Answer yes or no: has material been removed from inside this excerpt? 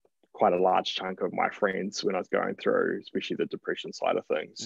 no